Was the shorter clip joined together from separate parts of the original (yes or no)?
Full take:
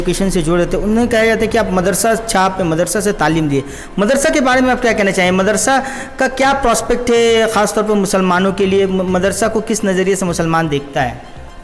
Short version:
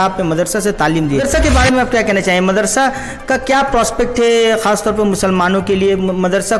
yes